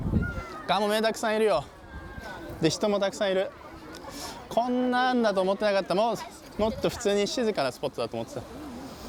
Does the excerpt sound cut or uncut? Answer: uncut